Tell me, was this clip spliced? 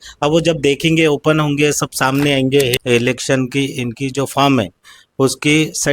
yes; 1 cut; at 2.8 s

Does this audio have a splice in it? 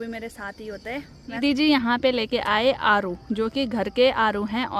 yes; 1 cut; at 1.4 s

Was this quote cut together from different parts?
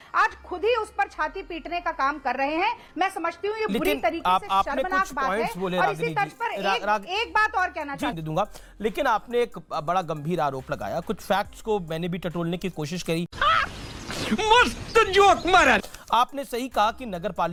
no; 0 cuts

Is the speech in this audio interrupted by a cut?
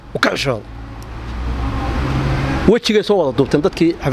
no; 0 cuts

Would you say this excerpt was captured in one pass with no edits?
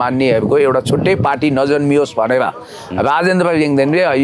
yes; 0 cuts

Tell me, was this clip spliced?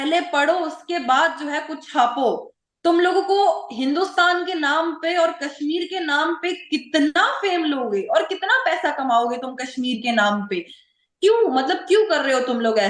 no; 0 cuts

